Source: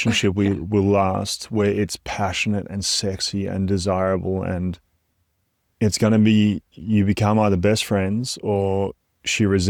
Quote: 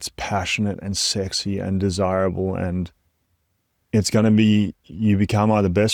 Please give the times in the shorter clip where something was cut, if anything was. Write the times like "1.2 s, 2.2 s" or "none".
none